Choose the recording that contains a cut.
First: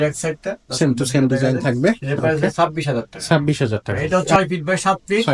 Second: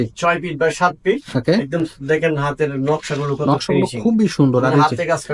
first; 1 cut; at 3.9 s

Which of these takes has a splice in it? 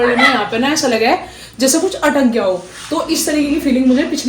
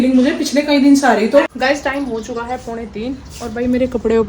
second; 1 cut; at 1.5 s

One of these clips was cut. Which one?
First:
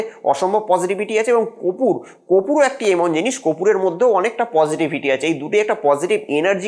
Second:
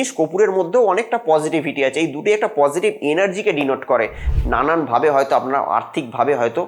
second; 1 cut; at 4.3 s

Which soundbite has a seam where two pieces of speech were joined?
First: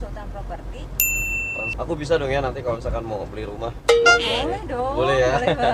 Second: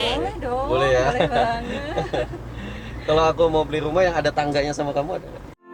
first; 1 cut; at 1.7 s

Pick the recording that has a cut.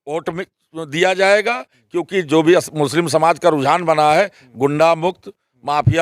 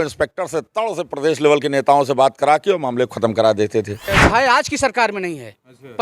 second; 1 cut; at 4.1 s

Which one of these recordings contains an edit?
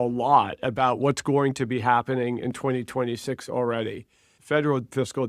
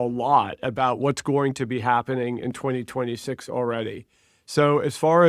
first; 1 cut; at 4.3 s

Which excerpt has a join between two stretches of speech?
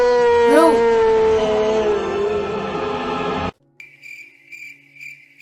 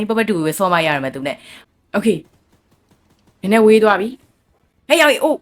second; 1 cut; at 1.5 s

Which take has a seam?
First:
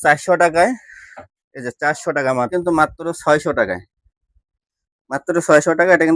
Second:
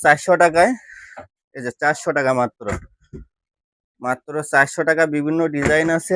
first; 1 cut; at 2.5 s

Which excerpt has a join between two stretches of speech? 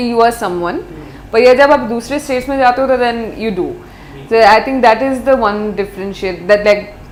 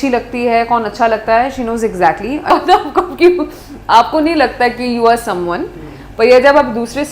second; 1 cut; at 2.5 s

